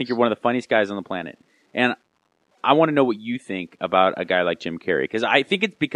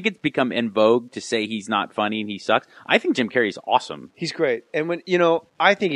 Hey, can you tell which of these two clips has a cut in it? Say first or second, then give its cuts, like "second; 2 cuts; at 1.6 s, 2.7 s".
second; 1 cut; at 3.9 s